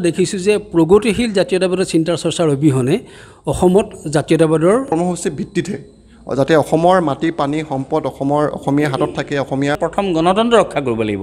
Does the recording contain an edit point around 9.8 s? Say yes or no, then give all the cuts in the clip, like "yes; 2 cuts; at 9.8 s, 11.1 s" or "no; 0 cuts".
yes; 2 cuts; at 4.9 s, 9.8 s